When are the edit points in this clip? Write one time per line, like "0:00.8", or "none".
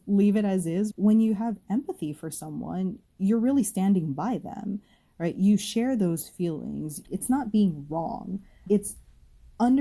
0:00.9
0:07.0
0:08.6